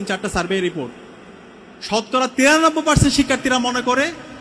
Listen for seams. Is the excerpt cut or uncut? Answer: uncut